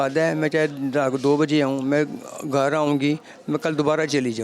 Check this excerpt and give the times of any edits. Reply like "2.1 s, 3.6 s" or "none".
none